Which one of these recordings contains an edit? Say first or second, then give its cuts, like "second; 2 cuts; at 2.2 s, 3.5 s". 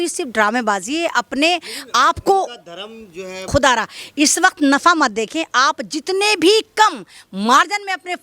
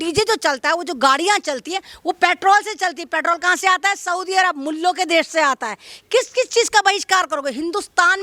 first; 1 cut; at 3.5 s